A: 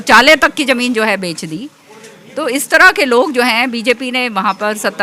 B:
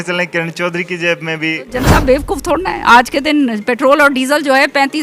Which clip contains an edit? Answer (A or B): B